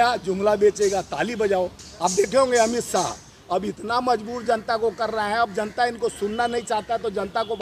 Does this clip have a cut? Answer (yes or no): yes